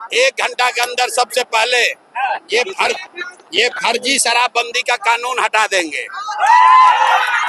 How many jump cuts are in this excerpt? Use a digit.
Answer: 0